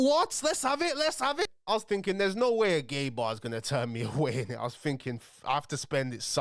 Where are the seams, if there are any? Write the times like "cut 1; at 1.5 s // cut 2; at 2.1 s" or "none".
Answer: cut 1; at 1.5 s